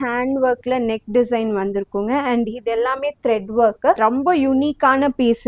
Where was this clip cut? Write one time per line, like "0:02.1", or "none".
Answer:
0:04.0